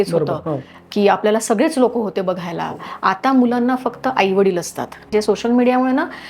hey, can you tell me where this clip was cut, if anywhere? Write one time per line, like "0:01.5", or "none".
0:05.1

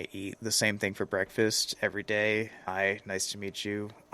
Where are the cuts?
0:02.6

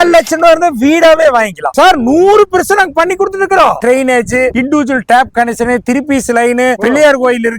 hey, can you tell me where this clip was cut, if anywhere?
0:01.7
0:03.8

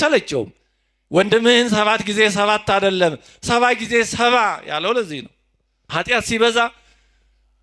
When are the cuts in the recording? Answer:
0:05.9

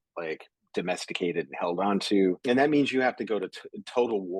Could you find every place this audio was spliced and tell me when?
0:02.4

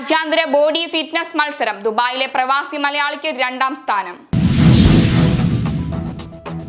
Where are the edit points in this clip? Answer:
0:04.2

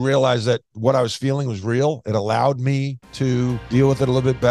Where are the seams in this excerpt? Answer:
0:03.6

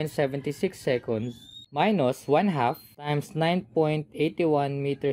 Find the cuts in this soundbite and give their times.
0:01.8
0:03.1

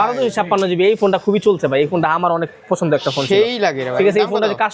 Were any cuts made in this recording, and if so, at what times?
none

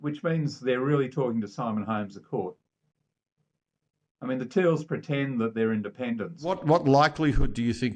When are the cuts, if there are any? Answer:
0:06.5

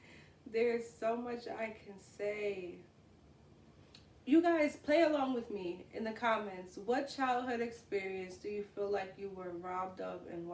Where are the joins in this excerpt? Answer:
none

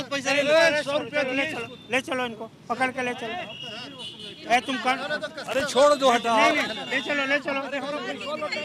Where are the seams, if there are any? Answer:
none

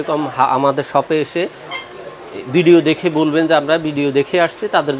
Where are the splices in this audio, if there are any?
none

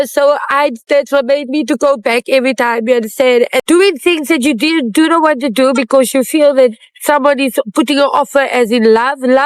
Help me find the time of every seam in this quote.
0:03.6

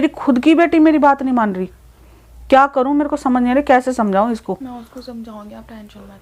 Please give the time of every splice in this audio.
none

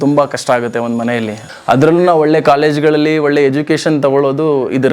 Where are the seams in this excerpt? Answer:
0:01.4

